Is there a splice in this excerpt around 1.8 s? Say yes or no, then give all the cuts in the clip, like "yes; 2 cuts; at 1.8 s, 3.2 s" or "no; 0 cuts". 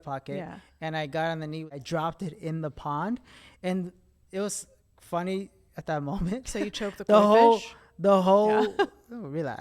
yes; 1 cut; at 1.8 s